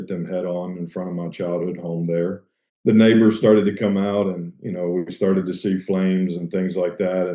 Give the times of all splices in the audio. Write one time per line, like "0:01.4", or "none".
0:02.6